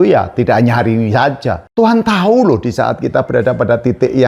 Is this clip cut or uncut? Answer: cut